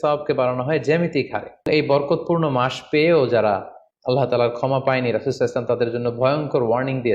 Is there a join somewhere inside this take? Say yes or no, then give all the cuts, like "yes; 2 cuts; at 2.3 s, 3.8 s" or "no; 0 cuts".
yes; 1 cut; at 1.7 s